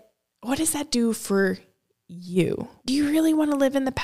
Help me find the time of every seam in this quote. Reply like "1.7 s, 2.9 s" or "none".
2.8 s